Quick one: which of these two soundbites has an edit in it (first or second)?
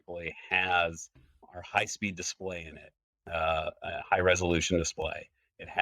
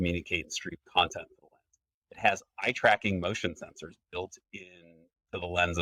first